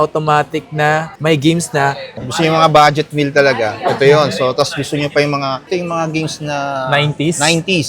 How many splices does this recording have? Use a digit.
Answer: 1